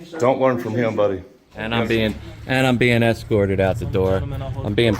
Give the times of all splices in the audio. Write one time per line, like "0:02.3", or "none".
0:01.5